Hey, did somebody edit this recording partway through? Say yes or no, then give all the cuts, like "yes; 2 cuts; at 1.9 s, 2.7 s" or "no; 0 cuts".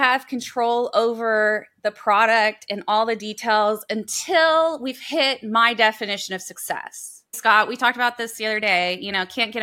yes; 1 cut; at 7.3 s